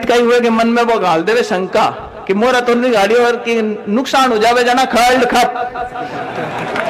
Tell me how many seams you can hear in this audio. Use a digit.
0